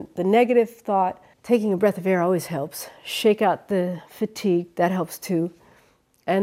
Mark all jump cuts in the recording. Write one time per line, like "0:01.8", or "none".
0:01.3